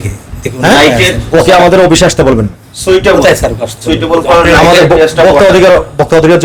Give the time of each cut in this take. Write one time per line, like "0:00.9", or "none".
none